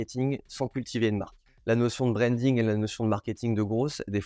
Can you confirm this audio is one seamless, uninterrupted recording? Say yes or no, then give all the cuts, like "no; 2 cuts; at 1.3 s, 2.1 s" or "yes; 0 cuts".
no; 1 cut; at 1.5 s